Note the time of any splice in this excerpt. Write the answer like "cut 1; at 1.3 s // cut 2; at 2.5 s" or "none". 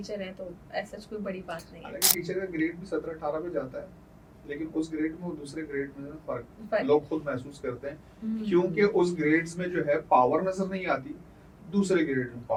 none